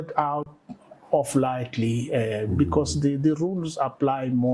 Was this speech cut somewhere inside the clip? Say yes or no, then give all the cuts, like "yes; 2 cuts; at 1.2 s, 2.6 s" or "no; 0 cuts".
no; 0 cuts